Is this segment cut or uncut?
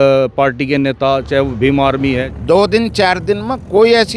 cut